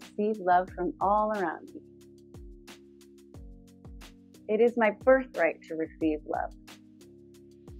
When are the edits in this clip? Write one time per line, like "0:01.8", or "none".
0:02.4
0:04.2
0:06.5